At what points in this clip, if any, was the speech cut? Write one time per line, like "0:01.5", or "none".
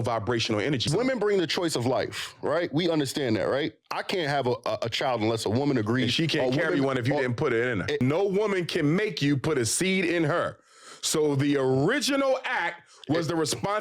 0:00.8
0:08.0